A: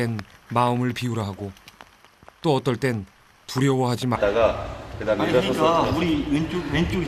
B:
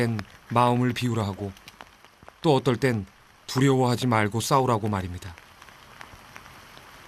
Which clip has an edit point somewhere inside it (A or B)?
B